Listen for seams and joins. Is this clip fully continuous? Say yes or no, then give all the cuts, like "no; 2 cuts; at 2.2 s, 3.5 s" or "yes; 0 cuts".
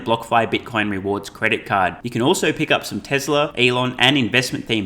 no; 1 cut; at 3.5 s